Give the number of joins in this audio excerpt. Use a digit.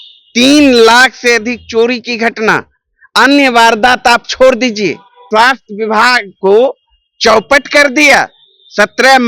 1